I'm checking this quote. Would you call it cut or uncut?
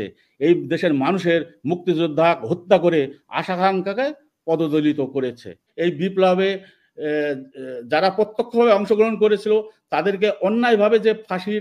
cut